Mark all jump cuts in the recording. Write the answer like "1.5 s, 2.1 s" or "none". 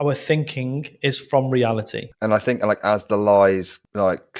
2.0 s